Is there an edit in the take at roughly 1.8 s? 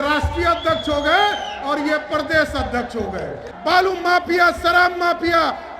no; 1 cut; at 3.5 s

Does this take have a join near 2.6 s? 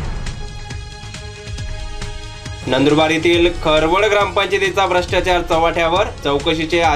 yes; 2 cuts; at 1.5 s, 2.6 s

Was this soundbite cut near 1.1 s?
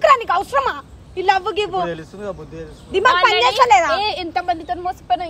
no; 0 cuts

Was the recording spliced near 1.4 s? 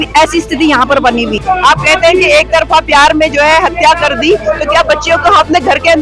yes; 1 cut; at 1.4 s

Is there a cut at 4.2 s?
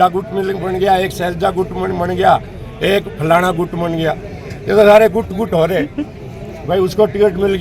no; 0 cuts

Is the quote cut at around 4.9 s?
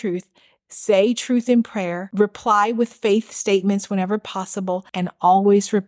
yes; 2 cuts; at 2.0 s, 4.9 s

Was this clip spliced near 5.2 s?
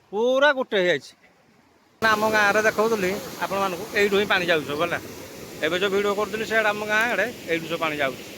no; 1 cut; at 2.0 s

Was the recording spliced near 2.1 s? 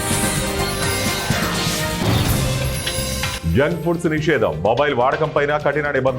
no; 1 cut; at 3.4 s

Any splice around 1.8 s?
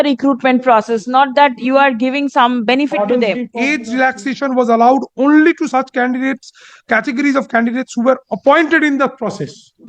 no; 1 cut; at 3.5 s

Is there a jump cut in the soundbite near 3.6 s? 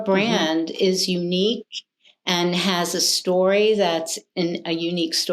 no; 0 cuts

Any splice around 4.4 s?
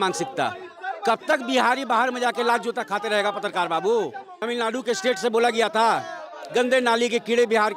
yes; 1 cut; at 4.4 s

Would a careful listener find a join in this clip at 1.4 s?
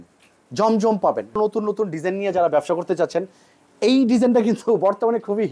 yes; 1 cut; at 1.4 s

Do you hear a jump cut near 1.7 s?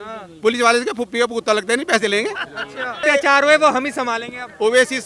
no; 1 cut; at 3.0 s

